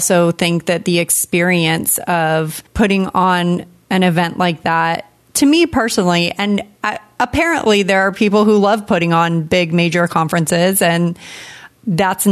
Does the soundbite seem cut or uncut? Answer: uncut